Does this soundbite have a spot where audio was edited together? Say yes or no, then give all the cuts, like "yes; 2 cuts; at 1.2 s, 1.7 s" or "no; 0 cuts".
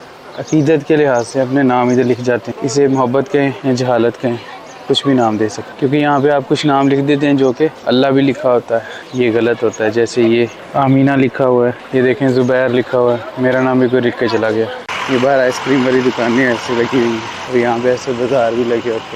yes; 9 cuts; at 2.5 s, 3.6 s, 5.6 s, 7.8 s, 9.0 s, 10.6 s, 11.8 s, 14.9 s, 17.3 s